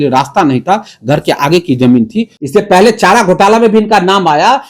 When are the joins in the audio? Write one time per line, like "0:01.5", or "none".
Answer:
0:02.3